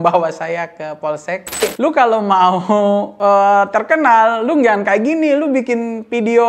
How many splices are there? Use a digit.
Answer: 1